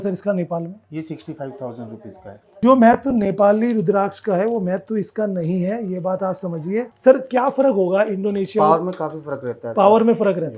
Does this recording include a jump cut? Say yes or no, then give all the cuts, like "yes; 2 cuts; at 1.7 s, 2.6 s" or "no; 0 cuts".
yes; 2 cuts; at 2.6 s, 6.9 s